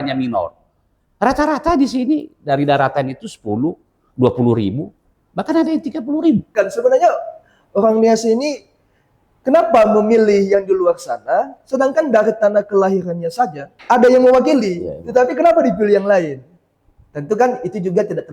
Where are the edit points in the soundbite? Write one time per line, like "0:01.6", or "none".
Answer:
0:06.5
0:13.7

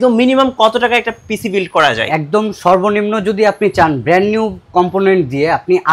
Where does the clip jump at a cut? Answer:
none

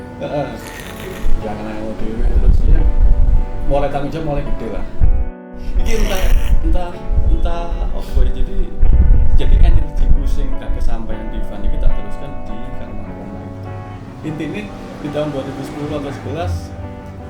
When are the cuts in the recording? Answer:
0:05.4

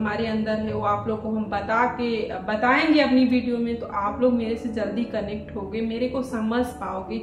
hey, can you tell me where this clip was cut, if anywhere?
none

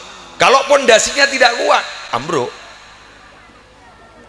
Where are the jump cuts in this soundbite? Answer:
none

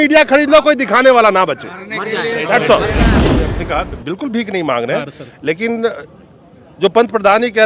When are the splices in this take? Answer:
0:03.2

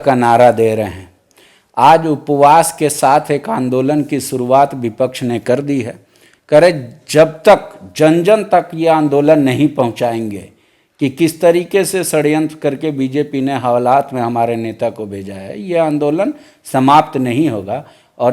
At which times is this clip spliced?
none

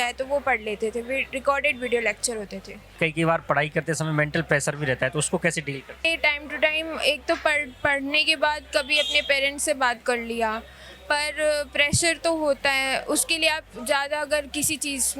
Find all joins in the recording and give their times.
0:02.9
0:06.0

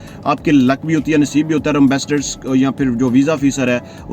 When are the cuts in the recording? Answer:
none

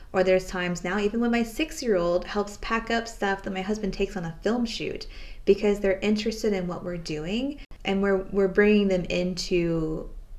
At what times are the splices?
0:07.7

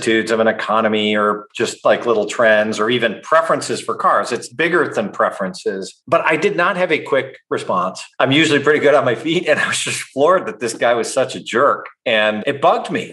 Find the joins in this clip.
none

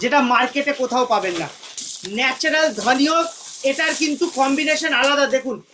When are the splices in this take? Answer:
0:01.8

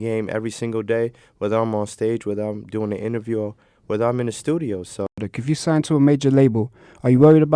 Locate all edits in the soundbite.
0:05.3

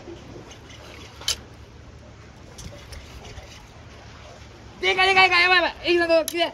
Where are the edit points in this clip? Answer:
none

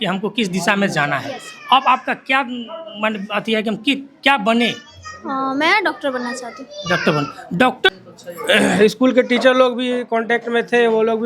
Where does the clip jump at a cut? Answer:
0:07.9

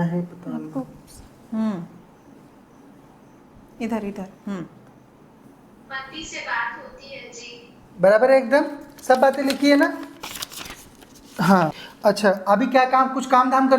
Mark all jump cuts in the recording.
0:11.8

